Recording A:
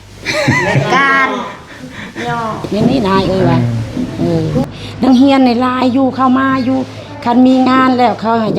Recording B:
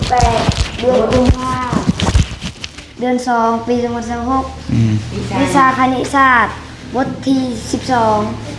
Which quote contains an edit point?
A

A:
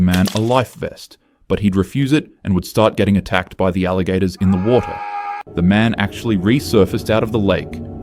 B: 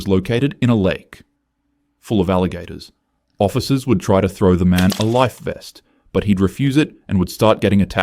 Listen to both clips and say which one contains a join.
A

